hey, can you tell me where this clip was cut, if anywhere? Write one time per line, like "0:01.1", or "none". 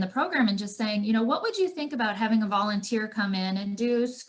none